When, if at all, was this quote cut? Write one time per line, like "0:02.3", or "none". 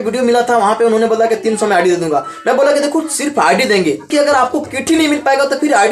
0:04.1